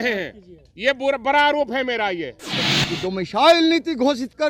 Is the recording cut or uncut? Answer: cut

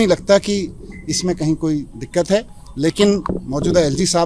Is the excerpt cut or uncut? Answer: uncut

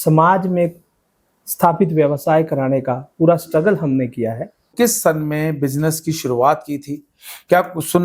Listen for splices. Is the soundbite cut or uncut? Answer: cut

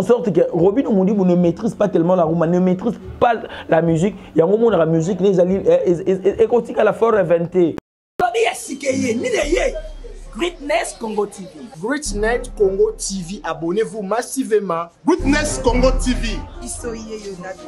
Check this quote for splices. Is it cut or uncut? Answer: cut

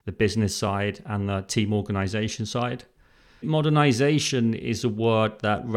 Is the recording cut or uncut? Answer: cut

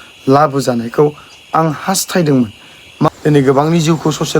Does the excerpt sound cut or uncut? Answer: cut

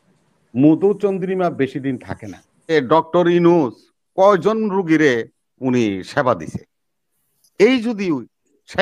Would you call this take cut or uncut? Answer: cut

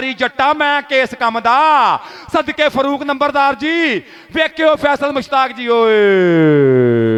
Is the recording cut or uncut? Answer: uncut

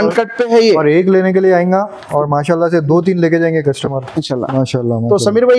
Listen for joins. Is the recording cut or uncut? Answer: cut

